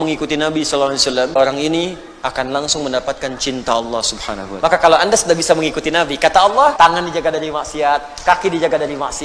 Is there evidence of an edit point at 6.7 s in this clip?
yes; 3 cuts; at 1.4 s, 4.4 s, 6.7 s

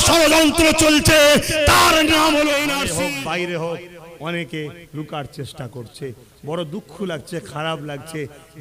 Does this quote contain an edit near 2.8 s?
yes; 1 cut; at 2.8 s

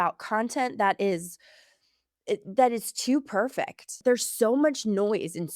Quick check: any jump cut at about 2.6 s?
no; 1 cut; at 3.9 s

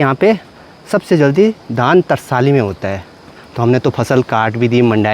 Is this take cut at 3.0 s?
no; 0 cuts

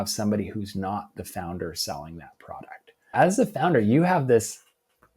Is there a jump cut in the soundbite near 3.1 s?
yes; 1 cut; at 3.1 s

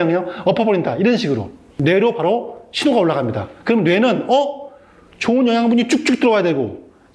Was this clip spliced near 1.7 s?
yes; 1 cut; at 1.7 s

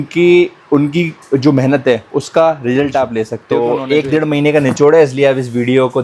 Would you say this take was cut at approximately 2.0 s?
no; 1 cut; at 3.4 s

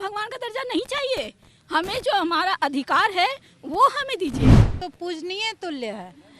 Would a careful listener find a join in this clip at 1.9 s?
no; 1 cut; at 4.7 s

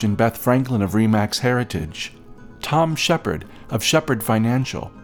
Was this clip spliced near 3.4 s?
no; 0 cuts

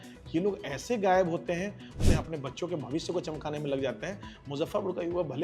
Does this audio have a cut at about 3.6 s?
no; 1 cut; at 2.0 s

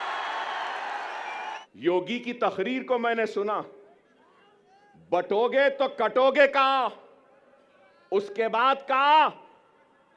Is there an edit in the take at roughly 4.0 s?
no; 1 cut; at 1.6 s

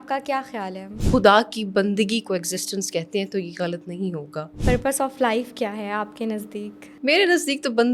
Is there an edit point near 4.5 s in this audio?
no; 1 cut; at 1.0 s

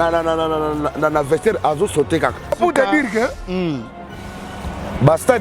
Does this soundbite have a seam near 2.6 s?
yes; 1 cut; at 2.6 s

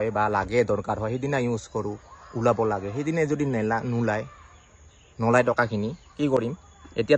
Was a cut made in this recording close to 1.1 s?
no; 0 cuts

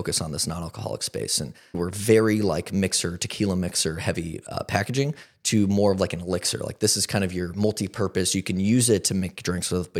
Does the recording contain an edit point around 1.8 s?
yes; 1 cut; at 1.8 s

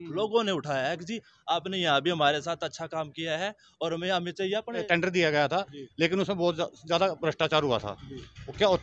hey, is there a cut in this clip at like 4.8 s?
yes; 1 cut; at 4.8 s

